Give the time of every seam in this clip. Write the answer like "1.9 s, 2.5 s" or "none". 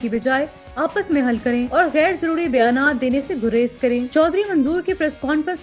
none

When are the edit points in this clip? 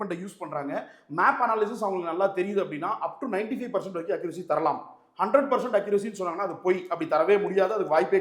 none

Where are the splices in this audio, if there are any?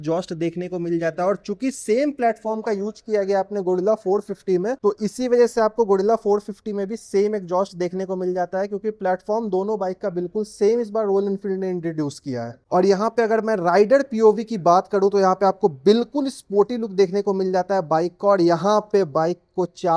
none

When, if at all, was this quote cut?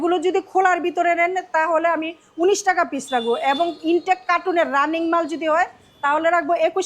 none

